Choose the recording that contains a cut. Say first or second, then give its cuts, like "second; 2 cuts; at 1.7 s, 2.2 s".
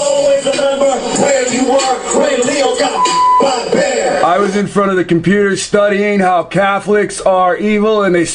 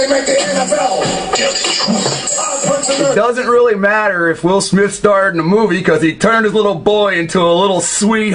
second; 1 cut; at 5.3 s